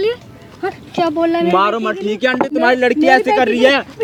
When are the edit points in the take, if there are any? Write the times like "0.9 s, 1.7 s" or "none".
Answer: none